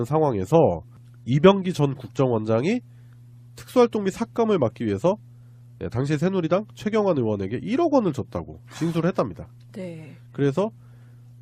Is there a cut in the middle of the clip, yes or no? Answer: no